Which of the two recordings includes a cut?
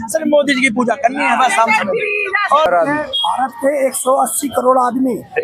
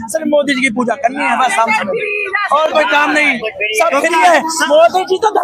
first; 1 cut; at 2.7 s

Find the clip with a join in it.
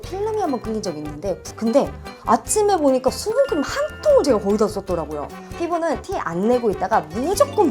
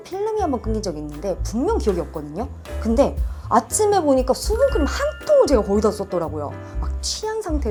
first; 2 cuts; at 1.4 s, 5.4 s

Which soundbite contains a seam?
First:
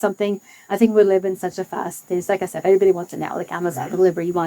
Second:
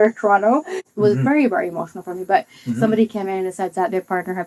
second; 1 cut; at 0.9 s

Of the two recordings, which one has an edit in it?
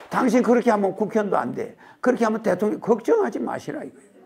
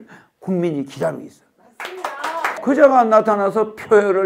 second; 1 cut; at 2.5 s

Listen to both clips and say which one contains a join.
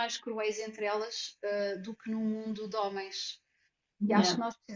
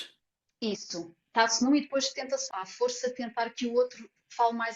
second; 1 cut; at 2.4 s

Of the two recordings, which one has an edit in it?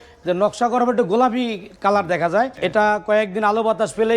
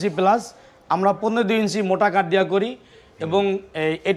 first; 1 cut; at 2.6 s

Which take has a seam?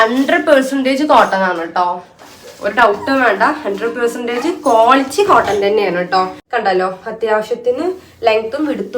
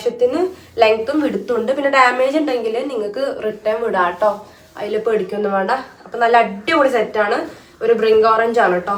first; 1 cut; at 6.4 s

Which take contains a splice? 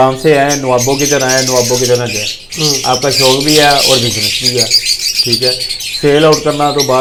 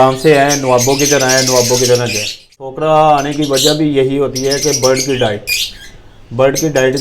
second; 1 cut; at 2.6 s

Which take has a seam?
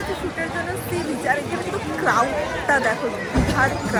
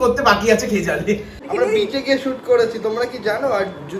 second; 1 cut; at 1.4 s

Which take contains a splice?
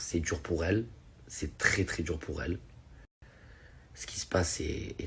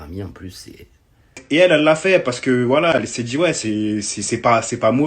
second; 1 cut; at 1.4 s

